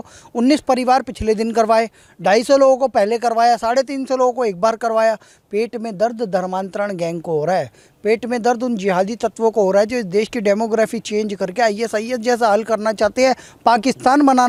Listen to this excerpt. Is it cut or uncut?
uncut